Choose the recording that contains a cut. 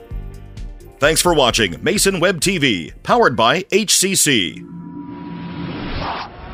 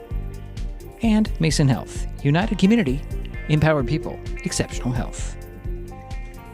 second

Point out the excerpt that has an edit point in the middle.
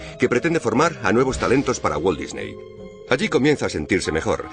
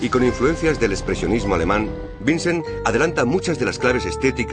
first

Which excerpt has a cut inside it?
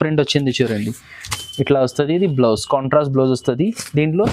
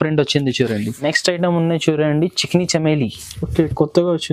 second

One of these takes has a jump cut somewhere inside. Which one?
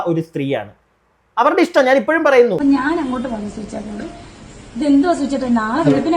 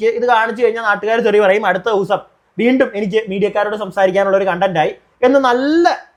first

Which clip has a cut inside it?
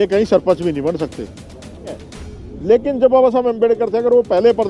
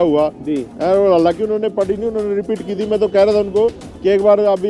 first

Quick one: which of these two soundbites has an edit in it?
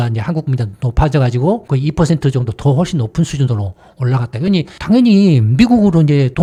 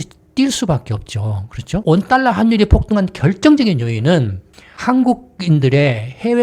second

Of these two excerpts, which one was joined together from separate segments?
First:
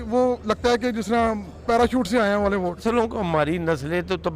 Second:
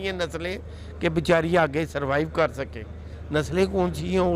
first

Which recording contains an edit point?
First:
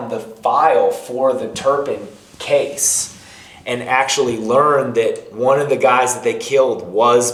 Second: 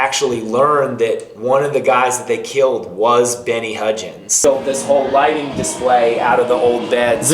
second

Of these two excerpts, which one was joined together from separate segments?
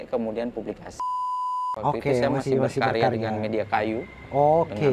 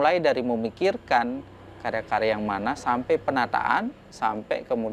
first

